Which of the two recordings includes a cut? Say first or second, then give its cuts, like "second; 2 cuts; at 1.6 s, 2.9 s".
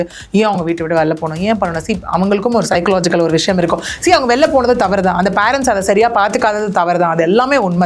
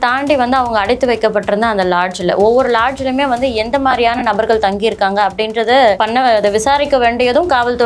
second; 1 cut; at 6.0 s